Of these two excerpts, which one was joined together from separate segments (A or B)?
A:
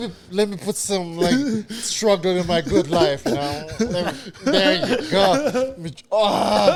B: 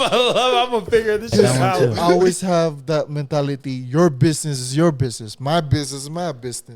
B